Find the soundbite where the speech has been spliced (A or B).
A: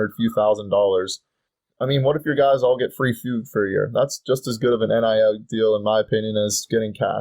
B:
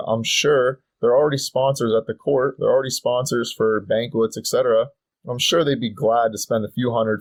A